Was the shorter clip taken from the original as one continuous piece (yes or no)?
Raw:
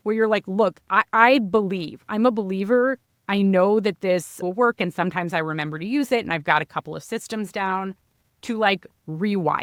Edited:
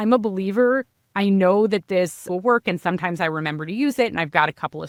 yes